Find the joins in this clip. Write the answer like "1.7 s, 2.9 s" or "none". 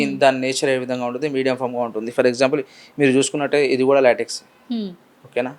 none